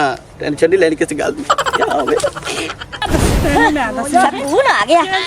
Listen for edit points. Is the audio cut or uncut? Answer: cut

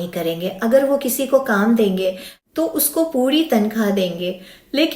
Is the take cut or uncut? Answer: cut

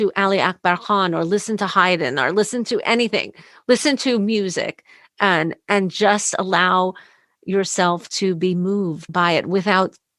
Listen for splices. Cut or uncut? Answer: cut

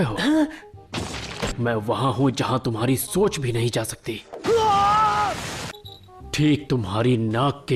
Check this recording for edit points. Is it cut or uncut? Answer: uncut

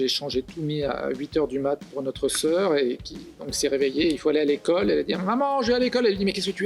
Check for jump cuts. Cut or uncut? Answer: uncut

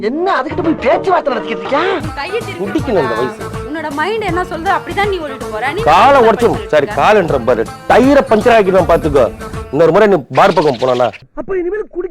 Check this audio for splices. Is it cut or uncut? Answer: cut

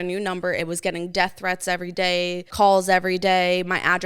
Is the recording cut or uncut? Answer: cut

